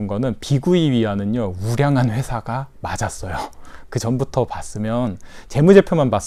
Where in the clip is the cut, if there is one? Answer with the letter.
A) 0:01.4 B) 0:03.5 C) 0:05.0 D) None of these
D